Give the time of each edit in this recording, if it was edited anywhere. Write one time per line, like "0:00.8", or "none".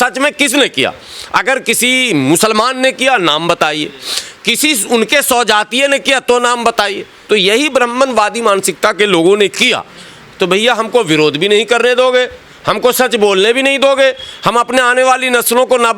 0:07.1

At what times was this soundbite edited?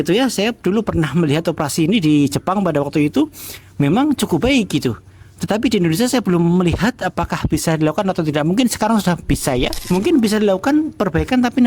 0:09.8

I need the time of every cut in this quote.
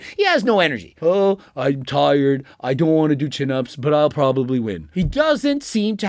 none

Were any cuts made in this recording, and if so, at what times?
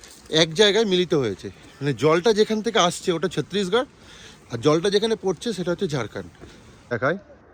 none

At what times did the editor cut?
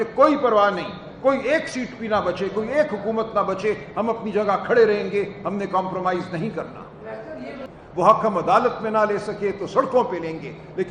none

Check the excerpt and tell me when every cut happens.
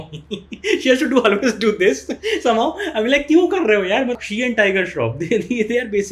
none

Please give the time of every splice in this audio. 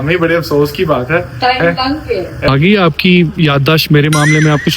0:02.5

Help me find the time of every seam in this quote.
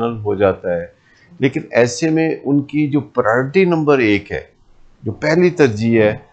none

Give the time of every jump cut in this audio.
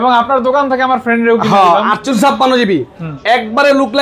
0:02.1

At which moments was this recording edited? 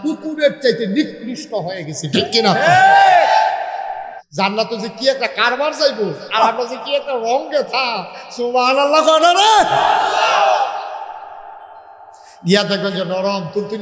0:04.1

